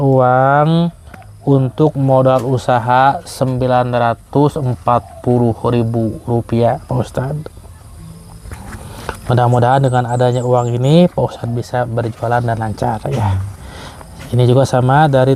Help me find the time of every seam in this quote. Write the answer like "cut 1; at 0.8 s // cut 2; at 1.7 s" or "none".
none